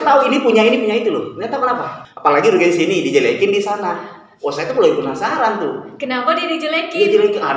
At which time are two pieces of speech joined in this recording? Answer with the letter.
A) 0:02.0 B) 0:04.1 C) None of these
A